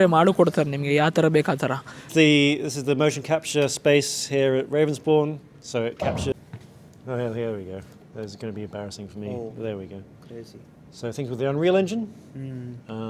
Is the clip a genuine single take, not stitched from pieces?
no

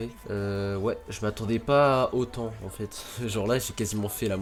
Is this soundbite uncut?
yes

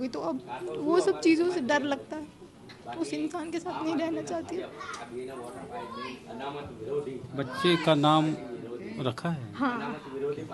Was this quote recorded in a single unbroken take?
yes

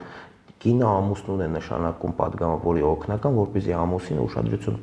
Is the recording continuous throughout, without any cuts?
yes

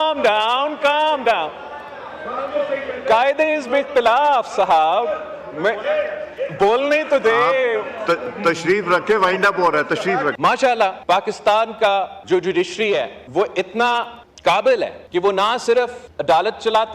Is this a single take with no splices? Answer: no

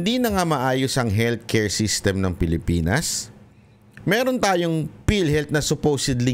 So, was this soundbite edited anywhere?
no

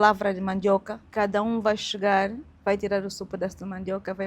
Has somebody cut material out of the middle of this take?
yes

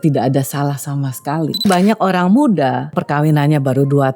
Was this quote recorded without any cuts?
no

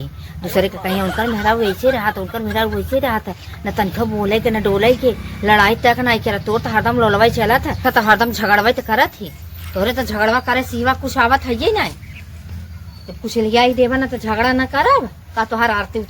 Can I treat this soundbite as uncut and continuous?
yes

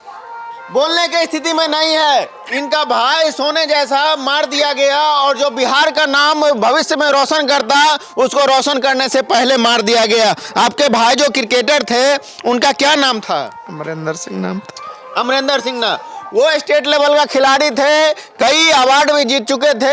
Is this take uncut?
yes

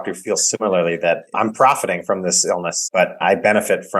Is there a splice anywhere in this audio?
yes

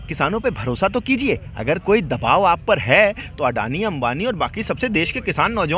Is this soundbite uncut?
yes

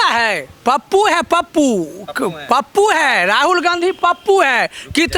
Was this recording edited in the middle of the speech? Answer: no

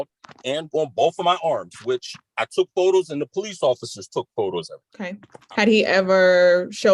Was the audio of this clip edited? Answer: yes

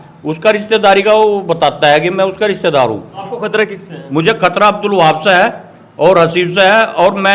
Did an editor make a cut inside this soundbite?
yes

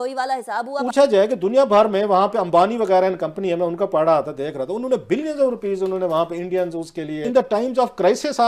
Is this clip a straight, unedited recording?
no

